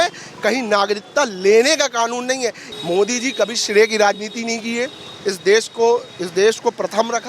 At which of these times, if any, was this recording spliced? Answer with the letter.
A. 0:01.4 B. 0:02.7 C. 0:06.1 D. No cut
B